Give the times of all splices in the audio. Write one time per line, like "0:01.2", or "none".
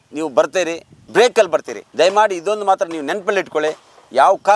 0:00.9
0:01.8